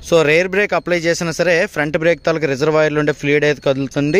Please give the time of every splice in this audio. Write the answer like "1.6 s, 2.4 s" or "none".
none